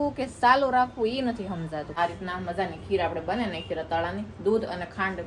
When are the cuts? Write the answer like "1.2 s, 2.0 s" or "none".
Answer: 1.9 s